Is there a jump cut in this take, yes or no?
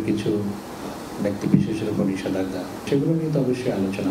yes